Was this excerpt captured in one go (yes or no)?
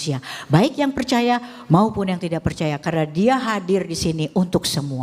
yes